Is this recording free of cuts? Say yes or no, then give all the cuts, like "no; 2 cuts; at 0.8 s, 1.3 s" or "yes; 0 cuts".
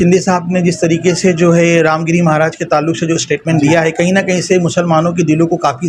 yes; 0 cuts